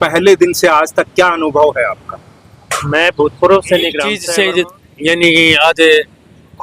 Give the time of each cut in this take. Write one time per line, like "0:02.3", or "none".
0:04.1